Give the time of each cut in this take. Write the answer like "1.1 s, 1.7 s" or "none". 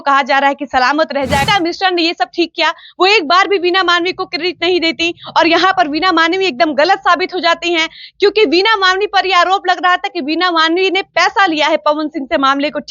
1.5 s